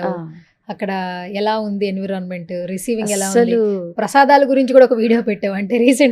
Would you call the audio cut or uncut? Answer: uncut